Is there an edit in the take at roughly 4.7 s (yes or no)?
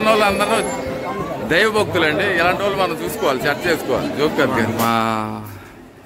yes